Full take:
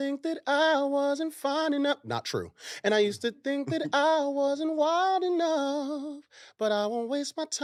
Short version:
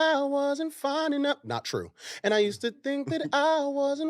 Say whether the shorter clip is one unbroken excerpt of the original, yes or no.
yes